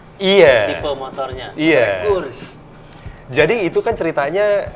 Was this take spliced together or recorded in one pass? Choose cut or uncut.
uncut